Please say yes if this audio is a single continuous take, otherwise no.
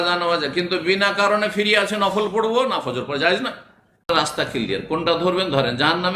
no